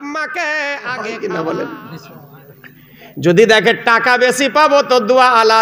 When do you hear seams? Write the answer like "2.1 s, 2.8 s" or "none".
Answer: 1.1 s